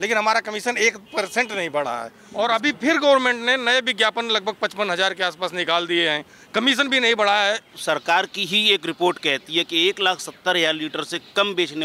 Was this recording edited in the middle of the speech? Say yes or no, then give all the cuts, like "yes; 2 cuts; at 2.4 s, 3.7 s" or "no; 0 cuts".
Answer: yes; 2 cuts; at 2.2 s, 7.7 s